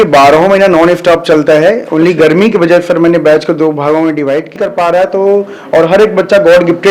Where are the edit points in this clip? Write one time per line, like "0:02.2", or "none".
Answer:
0:04.5